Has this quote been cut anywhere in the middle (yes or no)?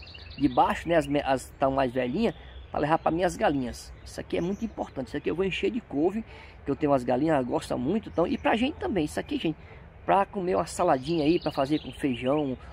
no